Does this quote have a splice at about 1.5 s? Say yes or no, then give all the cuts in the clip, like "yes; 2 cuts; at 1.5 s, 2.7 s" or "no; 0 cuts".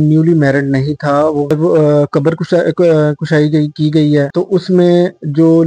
yes; 1 cut; at 1.5 s